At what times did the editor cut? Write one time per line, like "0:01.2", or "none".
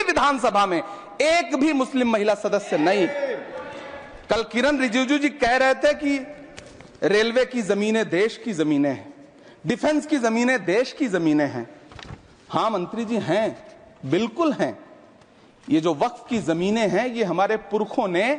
none